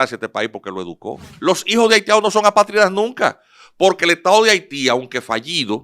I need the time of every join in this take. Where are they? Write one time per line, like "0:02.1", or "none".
0:01.3